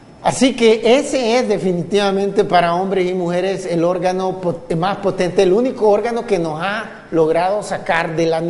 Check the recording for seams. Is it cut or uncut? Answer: cut